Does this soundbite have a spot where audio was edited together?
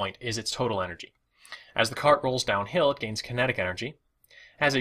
yes; 1 cut; at 2.0 s

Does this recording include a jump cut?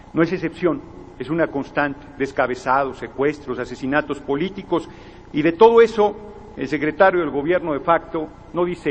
no; 0 cuts

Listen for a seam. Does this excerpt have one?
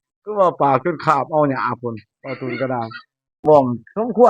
yes; 1 cut; at 3.3 s

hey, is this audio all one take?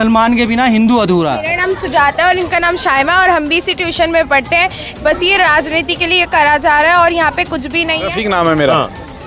no; 2 cuts; at 1.5 s, 8.1 s

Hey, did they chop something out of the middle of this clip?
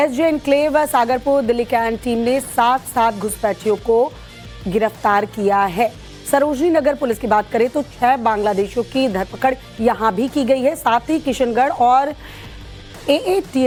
no; 0 cuts

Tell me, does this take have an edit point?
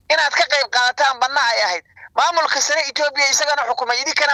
no; 0 cuts

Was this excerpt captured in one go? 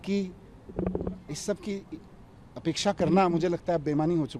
yes; 0 cuts

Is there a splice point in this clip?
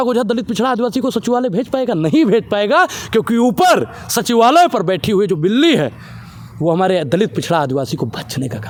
no; 0 cuts

